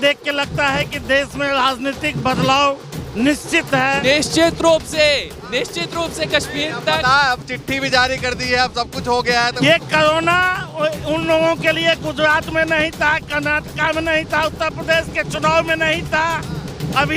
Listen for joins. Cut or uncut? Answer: cut